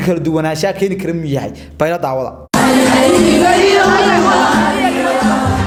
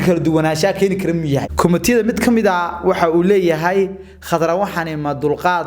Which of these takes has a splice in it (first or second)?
second